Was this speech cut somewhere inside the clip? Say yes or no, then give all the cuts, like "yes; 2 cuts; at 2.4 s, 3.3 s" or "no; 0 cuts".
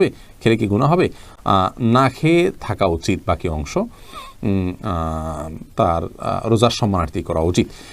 no; 0 cuts